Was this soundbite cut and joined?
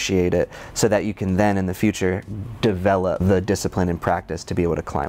yes; 1 cut; at 3.2 s

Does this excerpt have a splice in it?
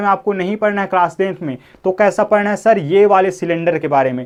no; 0 cuts

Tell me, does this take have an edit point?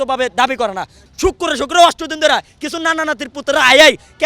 yes; 1 cut; at 1.1 s

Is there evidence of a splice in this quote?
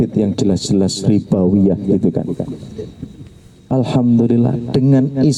no; 0 cuts

